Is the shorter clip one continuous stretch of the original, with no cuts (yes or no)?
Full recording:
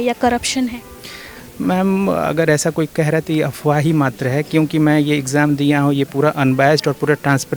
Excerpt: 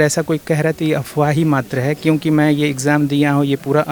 yes